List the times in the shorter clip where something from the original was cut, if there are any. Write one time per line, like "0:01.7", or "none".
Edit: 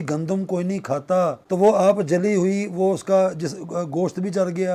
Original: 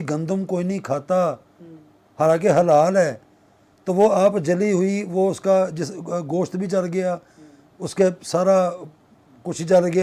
0:01.4